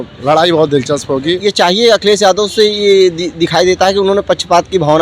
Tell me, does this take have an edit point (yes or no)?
yes